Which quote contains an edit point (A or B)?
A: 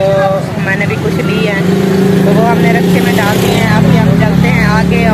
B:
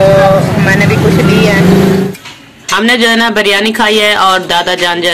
B